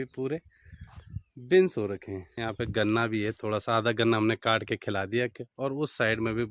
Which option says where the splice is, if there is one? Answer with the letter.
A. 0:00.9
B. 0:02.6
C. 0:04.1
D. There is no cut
D